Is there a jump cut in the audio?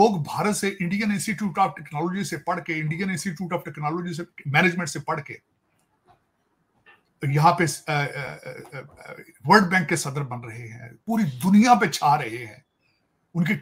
no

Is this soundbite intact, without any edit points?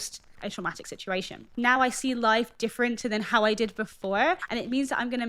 no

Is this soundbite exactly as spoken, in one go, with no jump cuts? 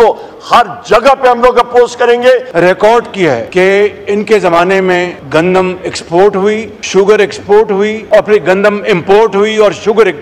no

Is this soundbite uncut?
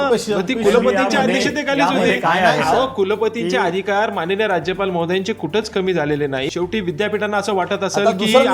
no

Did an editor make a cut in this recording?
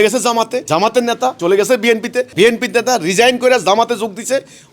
yes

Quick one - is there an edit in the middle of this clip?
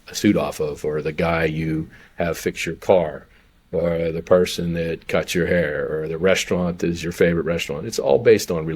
no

